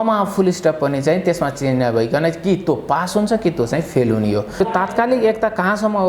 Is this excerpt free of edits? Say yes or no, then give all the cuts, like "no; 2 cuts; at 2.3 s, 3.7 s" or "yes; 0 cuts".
no; 1 cut; at 4.5 s